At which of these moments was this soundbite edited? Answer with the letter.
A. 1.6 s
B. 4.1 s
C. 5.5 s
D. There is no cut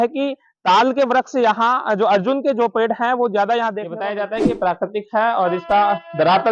B